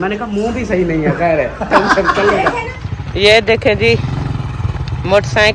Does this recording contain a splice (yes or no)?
yes